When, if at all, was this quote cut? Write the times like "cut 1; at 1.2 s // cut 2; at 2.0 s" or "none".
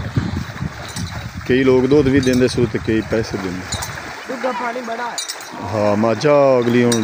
none